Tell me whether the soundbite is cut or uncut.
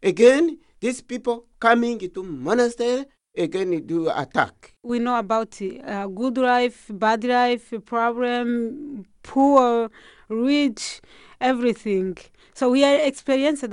cut